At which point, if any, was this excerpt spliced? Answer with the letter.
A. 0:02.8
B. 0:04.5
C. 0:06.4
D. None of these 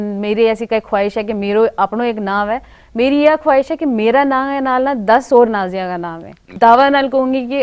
C